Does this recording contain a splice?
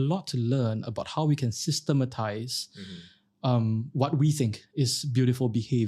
no; 0 cuts

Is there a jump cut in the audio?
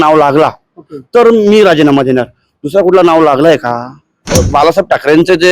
yes; 1 cut; at 4.3 s

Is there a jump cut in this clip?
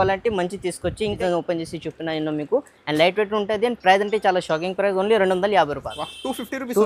yes; 1 cut; at 1.2 s

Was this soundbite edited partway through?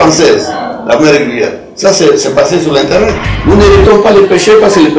yes; 1 cut; at 3.3 s

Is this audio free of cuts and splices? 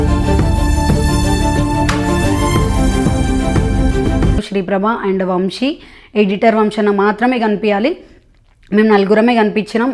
no; 1 cut; at 4.5 s

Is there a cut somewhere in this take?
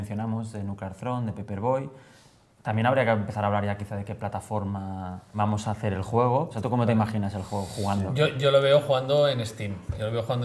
no; 0 cuts

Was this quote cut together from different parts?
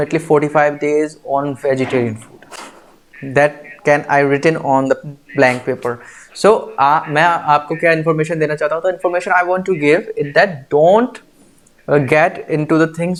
no; 0 cuts

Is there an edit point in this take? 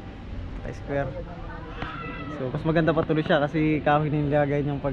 no; 0 cuts

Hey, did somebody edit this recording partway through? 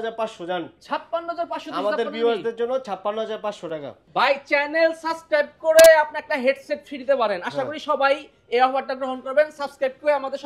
yes; 1 cut; at 4.0 s

